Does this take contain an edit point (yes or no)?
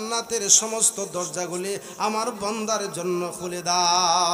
no